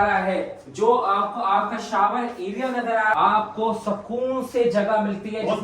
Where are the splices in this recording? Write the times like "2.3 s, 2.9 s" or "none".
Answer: 3.2 s